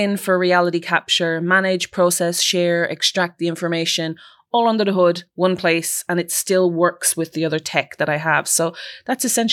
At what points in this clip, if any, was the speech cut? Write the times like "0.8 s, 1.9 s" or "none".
none